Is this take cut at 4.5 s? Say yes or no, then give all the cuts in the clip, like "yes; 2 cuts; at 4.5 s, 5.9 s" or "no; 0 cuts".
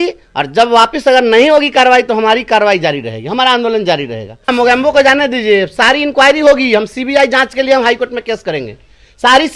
yes; 1 cut; at 4.5 s